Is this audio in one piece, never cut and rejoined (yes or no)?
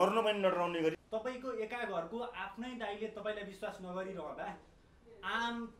no